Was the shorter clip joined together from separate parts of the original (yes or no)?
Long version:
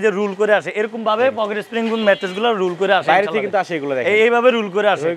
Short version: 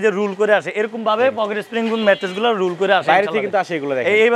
no